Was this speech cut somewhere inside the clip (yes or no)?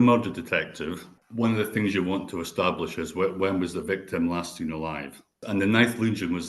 yes